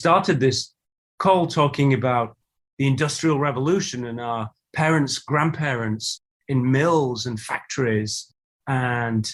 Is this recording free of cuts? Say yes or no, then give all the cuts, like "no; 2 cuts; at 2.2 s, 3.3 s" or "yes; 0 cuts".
yes; 0 cuts